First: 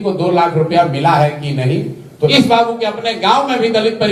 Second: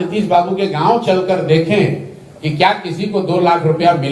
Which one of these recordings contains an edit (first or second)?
first